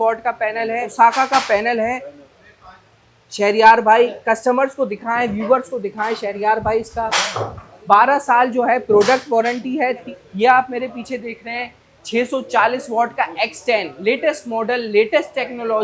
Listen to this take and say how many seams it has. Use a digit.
2